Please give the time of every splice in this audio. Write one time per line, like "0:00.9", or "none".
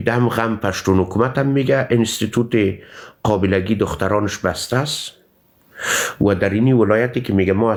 none